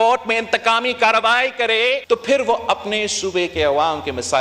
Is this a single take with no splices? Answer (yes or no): no